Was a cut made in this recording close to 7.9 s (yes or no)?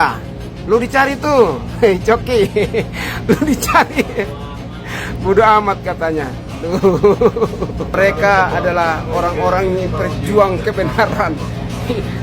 yes